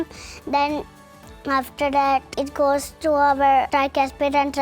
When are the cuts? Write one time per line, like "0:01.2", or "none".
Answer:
0:02.3
0:03.7